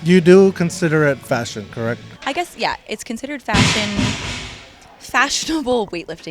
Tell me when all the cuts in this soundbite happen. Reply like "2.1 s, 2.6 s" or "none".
2.0 s